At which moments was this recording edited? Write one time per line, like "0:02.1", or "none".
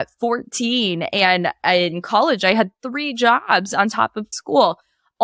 0:04.3